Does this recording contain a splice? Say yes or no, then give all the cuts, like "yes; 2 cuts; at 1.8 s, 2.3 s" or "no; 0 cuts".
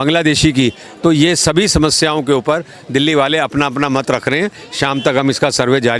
no; 0 cuts